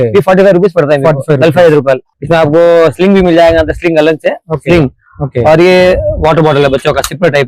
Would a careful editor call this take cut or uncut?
cut